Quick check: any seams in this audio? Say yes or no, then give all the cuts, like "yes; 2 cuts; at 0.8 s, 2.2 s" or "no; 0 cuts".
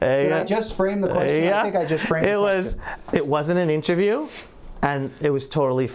no; 0 cuts